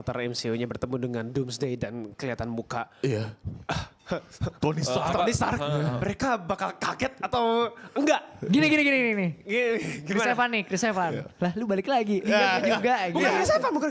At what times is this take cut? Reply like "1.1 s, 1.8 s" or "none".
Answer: none